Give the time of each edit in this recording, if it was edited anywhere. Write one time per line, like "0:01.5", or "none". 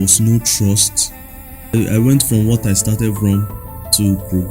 0:01.7

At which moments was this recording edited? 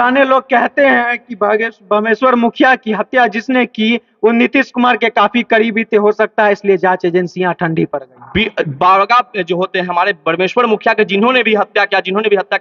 none

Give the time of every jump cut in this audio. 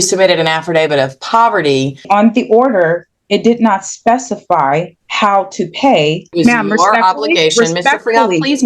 0:02.0
0:05.0
0:06.3

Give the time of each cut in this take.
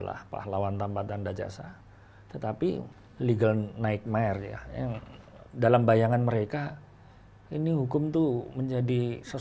0:02.9

